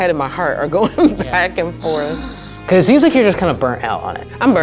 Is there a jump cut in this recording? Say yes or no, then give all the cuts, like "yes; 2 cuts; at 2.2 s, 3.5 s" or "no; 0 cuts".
yes; 1 cut; at 2.2 s